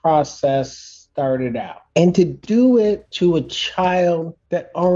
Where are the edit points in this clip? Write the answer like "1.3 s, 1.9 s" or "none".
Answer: 1.8 s